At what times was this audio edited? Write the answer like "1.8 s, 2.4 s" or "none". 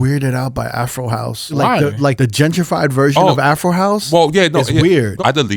1.4 s, 2.2 s